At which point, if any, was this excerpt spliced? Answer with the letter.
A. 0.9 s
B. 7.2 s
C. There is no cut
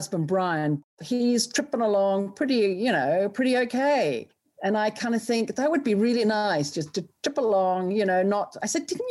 A